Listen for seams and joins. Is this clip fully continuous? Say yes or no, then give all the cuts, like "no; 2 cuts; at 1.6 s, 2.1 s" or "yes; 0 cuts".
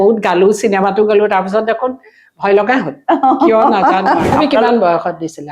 no; 1 cut; at 4.3 s